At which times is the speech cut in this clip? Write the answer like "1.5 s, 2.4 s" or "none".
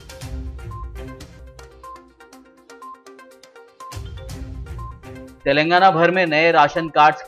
0.9 s